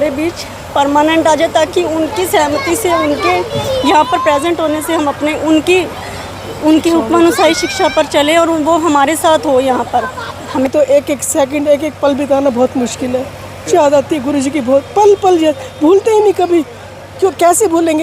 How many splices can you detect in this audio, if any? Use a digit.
2